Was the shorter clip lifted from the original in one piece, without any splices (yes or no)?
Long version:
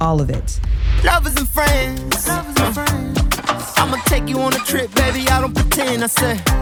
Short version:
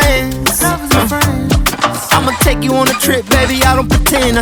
yes